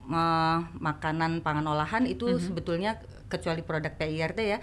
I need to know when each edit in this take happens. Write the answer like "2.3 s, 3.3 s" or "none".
none